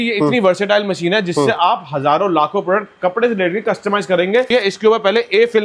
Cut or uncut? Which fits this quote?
cut